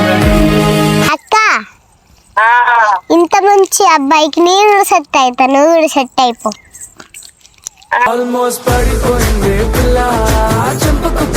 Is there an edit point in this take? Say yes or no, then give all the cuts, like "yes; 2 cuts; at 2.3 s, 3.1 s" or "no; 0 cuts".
yes; 1 cut; at 1.1 s